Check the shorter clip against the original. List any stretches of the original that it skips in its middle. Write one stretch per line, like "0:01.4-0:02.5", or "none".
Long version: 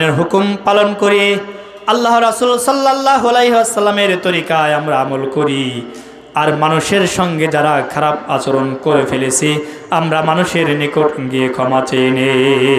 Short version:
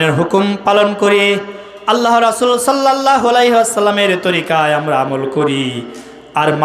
none